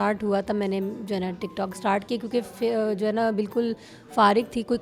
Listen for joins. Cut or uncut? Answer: uncut